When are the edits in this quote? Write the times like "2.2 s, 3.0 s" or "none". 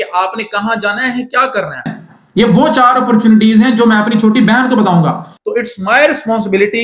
2.0 s, 5.3 s

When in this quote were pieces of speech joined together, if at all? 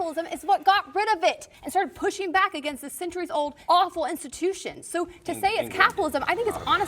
1.5 s, 3.6 s

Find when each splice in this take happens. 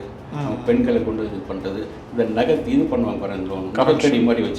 3.7 s

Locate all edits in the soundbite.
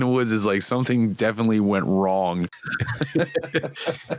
2.5 s

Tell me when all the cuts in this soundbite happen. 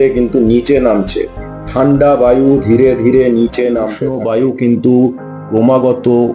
4.0 s

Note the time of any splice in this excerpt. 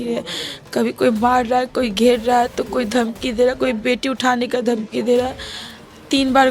none

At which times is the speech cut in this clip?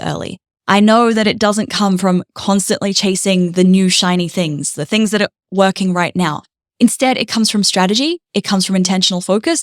none

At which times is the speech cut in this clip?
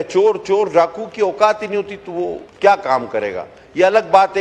2.4 s

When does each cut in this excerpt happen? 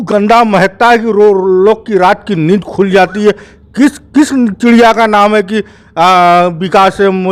none

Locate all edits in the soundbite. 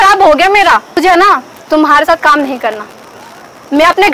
1.0 s

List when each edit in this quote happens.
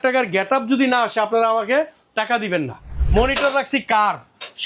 2.9 s

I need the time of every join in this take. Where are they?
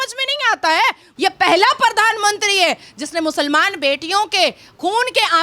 1.1 s

